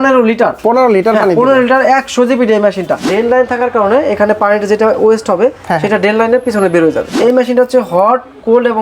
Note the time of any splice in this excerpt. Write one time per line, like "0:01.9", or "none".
0:03.1
0:07.1